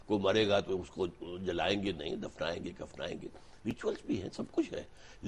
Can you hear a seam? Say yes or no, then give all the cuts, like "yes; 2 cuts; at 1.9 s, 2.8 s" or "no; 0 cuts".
no; 0 cuts